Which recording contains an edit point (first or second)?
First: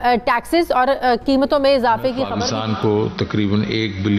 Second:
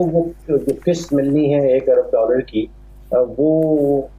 first